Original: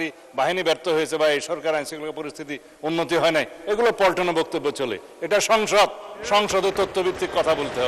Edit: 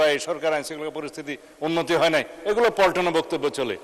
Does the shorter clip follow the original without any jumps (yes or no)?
yes